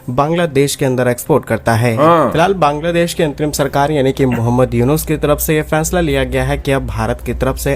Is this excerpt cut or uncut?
cut